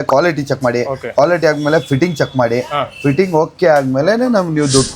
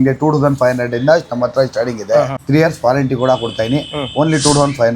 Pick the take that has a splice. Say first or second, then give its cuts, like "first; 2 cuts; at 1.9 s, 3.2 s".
second; 1 cut; at 2.4 s